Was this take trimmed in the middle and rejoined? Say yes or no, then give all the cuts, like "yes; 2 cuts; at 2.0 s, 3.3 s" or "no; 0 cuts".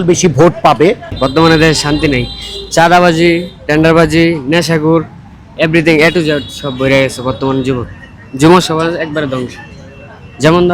yes; 1 cut; at 1.2 s